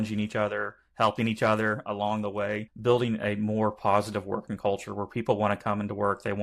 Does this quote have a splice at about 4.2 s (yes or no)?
no